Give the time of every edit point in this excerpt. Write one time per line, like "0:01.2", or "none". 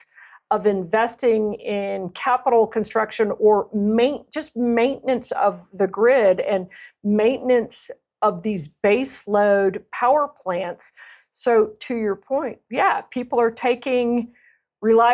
none